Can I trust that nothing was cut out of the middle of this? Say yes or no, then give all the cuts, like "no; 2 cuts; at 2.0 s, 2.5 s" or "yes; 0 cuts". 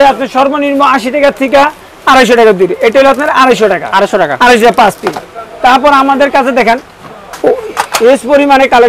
yes; 0 cuts